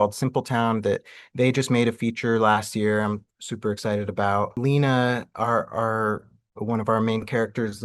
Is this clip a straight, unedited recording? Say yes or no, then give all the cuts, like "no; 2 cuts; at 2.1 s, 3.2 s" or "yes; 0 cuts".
no; 1 cut; at 4.5 s